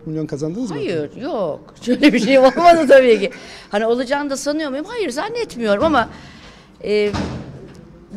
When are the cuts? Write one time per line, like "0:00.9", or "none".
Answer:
none